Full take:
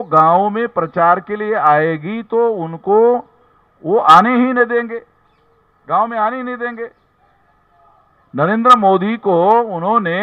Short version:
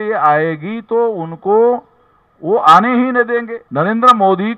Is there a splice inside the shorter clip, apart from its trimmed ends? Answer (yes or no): yes